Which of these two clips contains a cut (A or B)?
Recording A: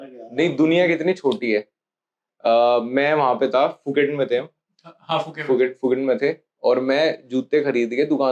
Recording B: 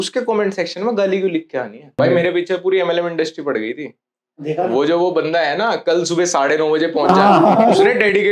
B